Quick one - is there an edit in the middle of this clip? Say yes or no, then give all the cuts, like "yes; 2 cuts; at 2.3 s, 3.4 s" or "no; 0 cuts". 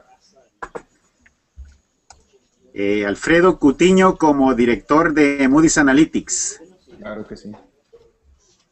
no; 0 cuts